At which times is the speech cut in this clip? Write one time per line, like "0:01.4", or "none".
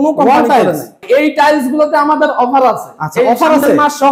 0:01.0

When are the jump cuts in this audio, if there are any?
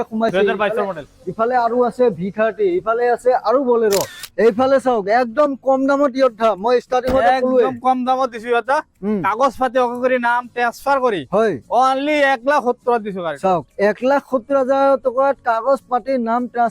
0:04.2

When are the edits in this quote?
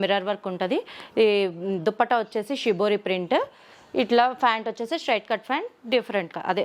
none

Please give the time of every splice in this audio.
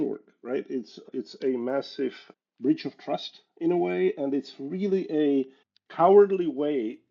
0:01.0
0:02.3

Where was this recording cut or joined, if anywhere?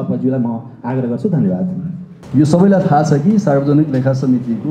none

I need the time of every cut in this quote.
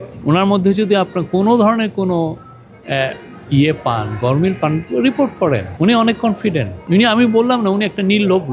0:05.7
0:06.7

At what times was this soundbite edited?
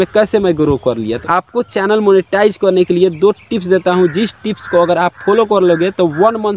0:01.1

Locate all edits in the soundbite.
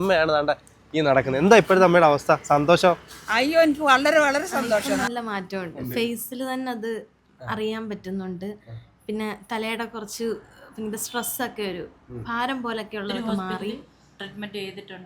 0:05.0
0:13.9

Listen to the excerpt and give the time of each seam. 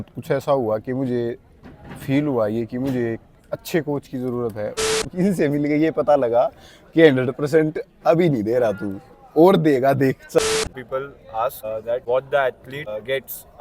0:05.0
0:10.4

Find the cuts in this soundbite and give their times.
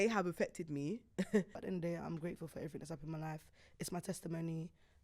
0:01.6

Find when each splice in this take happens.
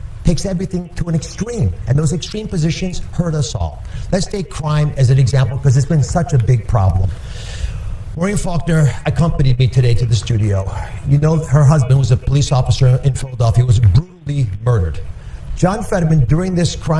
0:15.8

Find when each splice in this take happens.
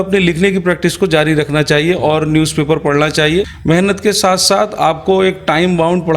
0:03.5

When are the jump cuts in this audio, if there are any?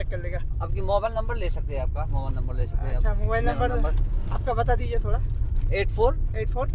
none

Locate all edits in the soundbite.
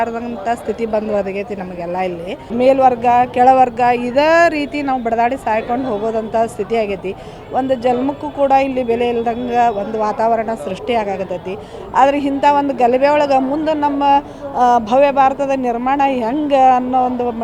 0:02.5

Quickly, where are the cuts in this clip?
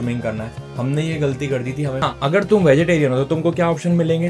0:02.0

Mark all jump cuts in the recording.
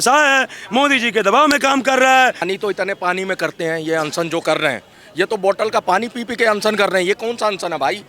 0:02.5

